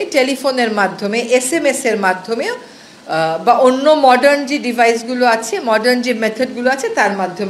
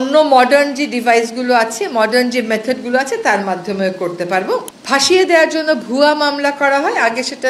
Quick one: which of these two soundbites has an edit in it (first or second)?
second